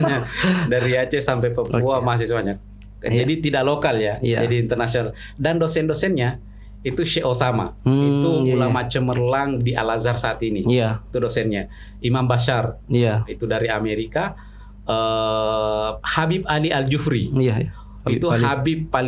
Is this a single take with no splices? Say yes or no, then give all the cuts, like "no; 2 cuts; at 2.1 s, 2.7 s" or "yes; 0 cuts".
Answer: yes; 0 cuts